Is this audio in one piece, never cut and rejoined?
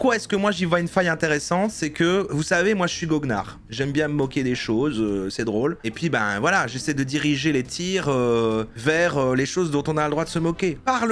yes; 0 cuts

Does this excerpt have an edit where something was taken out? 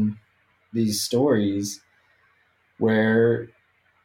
no; 0 cuts

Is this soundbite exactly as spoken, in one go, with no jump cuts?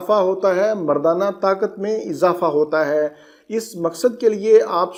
yes; 0 cuts

